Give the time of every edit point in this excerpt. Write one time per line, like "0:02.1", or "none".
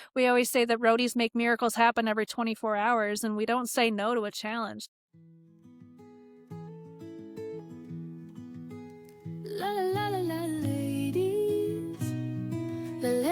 0:04.8